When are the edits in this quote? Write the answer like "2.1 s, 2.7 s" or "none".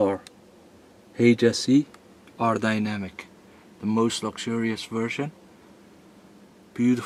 none